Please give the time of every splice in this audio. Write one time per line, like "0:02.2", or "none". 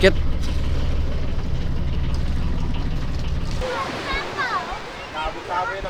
0:03.6